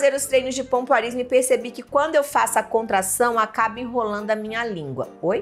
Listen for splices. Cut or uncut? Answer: uncut